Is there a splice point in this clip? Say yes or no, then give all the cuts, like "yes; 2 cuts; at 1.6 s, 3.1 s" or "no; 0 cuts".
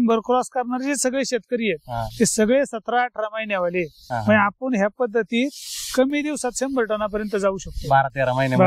no; 0 cuts